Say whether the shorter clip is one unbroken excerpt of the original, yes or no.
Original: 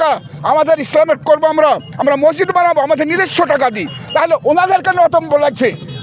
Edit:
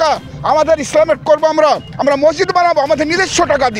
yes